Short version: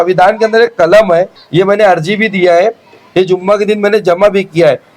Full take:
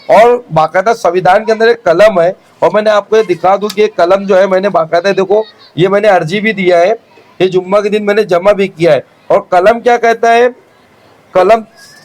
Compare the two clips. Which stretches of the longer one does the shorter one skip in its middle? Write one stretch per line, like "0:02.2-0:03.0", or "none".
0:02.4-0:05.6